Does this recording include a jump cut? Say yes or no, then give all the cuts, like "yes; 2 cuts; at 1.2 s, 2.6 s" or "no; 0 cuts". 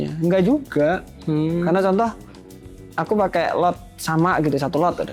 no; 0 cuts